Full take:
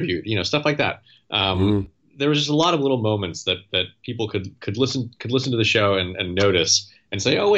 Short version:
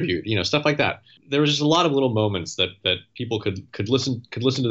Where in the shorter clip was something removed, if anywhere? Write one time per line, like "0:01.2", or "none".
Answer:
0:01.1

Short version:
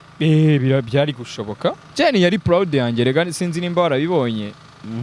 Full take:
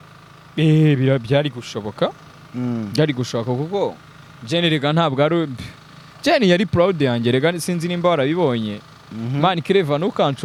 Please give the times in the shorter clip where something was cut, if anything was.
0:01.8

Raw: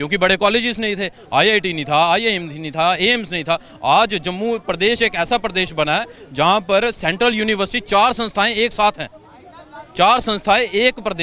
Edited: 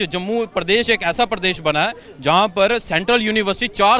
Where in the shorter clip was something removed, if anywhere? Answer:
none

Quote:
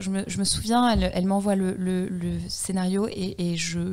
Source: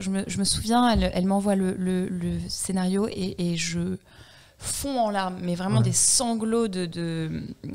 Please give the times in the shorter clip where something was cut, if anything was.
none

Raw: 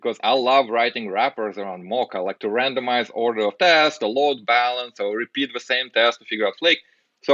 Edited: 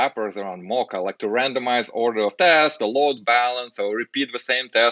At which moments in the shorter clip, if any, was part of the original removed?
none

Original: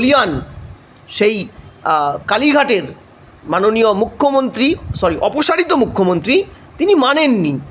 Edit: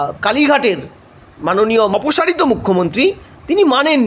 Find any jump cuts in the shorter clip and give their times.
0:01.9

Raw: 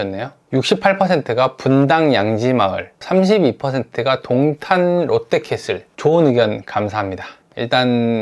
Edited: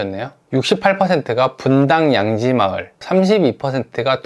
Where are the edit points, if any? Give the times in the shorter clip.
none

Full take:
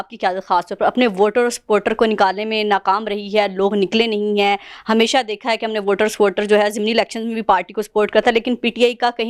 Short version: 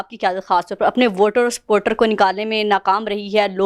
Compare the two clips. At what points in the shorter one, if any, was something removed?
none

